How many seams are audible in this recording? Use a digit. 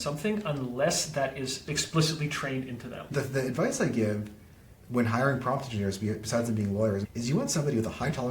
3